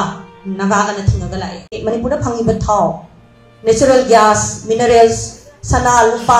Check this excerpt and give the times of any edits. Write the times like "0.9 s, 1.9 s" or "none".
1.8 s

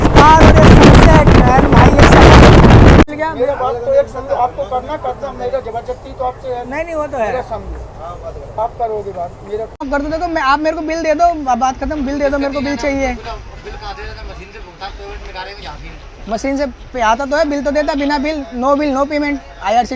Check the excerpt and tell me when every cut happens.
3.0 s, 9.8 s

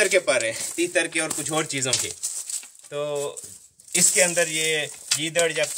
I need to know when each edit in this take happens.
none

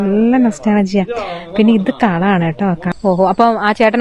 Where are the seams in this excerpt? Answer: 2.9 s

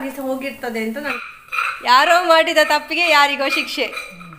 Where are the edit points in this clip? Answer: 1.1 s

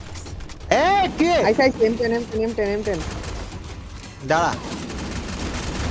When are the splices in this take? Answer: none

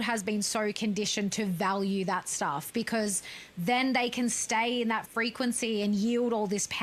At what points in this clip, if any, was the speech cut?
none

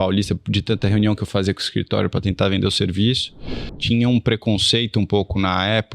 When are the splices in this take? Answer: 3.8 s

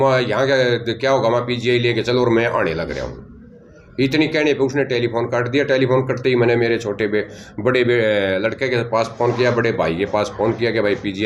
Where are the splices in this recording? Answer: none

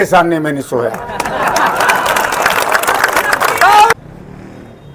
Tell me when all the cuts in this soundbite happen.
3.9 s

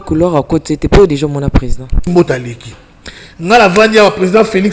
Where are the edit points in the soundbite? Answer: 2.0 s

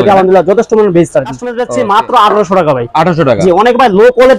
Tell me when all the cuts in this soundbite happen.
1.5 s

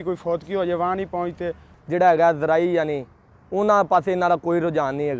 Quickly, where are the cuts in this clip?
1.7 s

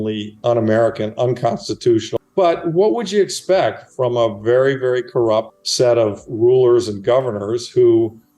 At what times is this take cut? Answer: 2.1 s, 5.6 s

